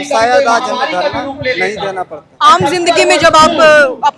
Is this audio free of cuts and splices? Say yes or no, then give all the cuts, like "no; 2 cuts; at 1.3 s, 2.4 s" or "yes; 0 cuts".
yes; 0 cuts